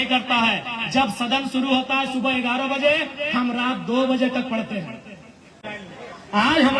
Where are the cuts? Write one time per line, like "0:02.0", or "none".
0:05.7